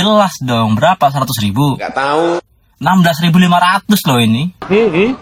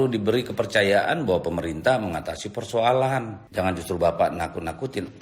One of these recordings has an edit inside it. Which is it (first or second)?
second